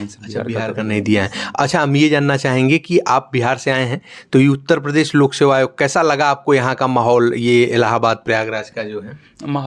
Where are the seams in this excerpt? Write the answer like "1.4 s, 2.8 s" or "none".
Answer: none